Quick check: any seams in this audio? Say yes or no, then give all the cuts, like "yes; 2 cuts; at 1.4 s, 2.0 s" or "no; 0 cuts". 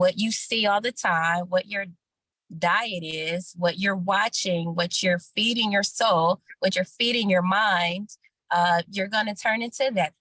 no; 0 cuts